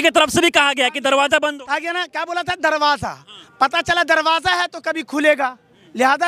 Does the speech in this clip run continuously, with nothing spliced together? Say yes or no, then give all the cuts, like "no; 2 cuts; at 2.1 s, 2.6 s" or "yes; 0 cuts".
yes; 0 cuts